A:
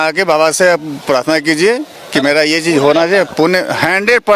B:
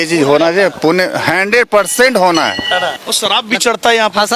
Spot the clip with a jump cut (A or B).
B